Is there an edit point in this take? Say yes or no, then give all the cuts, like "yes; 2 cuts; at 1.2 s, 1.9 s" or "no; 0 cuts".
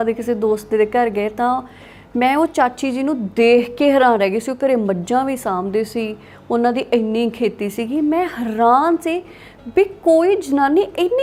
no; 0 cuts